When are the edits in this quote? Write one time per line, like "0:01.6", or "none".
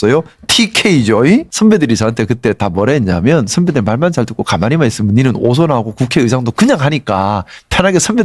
0:01.5